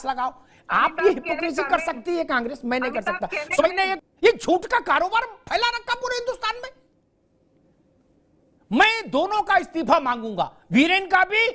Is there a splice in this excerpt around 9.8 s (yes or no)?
no